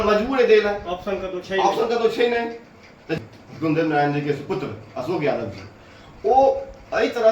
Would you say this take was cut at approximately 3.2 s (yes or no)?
yes